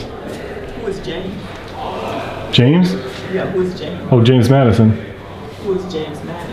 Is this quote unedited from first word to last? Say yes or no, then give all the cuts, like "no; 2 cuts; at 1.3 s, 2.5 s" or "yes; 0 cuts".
yes; 0 cuts